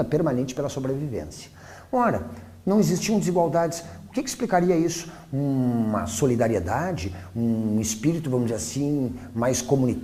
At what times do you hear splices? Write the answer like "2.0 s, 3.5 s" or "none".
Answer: none